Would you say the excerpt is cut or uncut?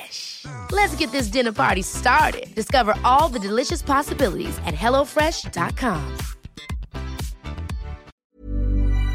cut